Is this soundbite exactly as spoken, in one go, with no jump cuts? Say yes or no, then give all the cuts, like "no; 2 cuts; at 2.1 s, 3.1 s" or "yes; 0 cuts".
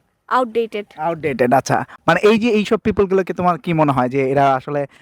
yes; 0 cuts